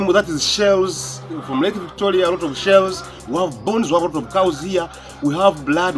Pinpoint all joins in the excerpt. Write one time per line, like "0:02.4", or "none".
0:01.4